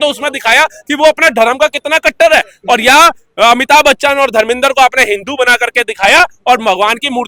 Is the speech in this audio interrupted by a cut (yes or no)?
no